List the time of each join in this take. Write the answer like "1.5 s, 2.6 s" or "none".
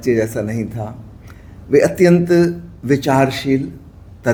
none